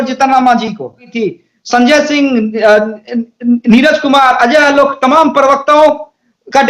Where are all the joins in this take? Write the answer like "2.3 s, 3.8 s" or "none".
1.1 s